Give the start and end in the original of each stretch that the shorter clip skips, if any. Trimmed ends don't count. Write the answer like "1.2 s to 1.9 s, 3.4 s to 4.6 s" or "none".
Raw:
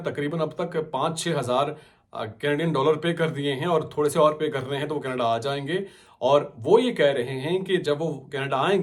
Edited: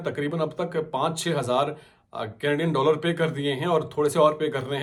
none